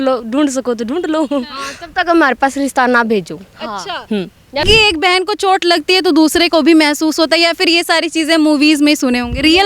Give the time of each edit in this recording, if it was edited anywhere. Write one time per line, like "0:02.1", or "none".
0:04.6